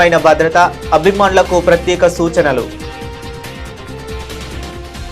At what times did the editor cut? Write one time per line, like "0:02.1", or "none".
0:03.2